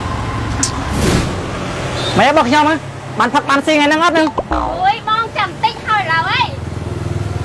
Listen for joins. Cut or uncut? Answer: uncut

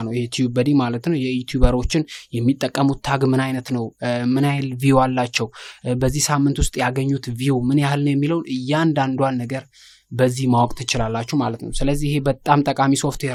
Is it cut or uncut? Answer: uncut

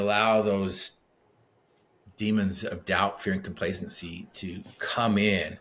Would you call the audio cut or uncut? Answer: uncut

